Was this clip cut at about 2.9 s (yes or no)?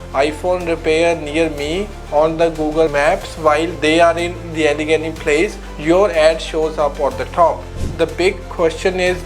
yes